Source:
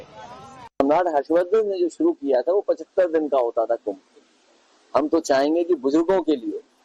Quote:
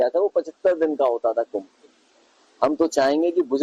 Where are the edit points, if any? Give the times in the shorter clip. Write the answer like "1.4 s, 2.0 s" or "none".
none